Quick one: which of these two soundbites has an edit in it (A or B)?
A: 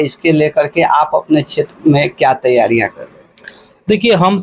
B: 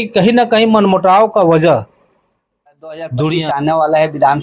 B